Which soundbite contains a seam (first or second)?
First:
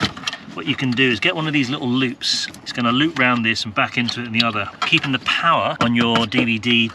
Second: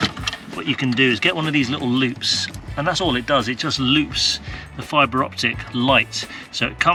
first